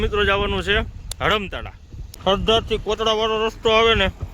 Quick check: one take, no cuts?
no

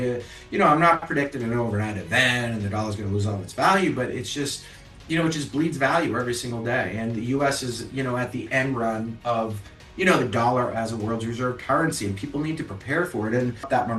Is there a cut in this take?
no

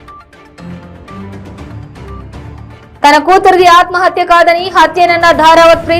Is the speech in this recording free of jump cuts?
yes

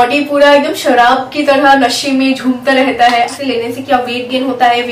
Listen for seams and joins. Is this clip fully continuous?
no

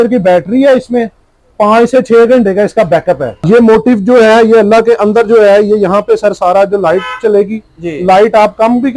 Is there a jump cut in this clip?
yes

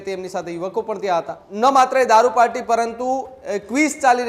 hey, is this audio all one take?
no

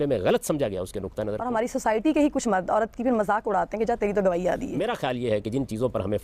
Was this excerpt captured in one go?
no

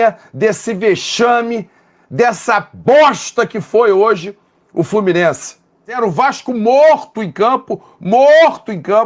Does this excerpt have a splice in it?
yes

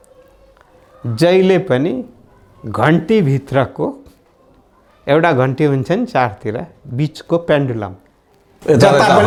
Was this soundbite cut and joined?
no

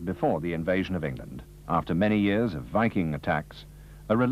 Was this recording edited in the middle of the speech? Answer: yes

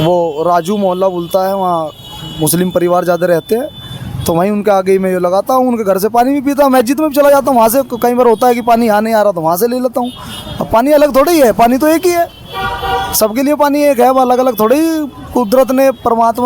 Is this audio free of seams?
yes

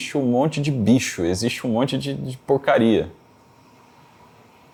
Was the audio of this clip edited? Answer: no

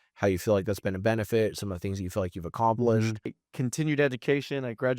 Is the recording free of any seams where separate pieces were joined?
no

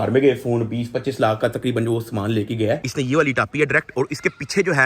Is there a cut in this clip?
yes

